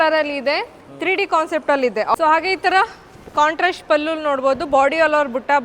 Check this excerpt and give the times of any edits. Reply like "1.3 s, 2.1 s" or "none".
2.1 s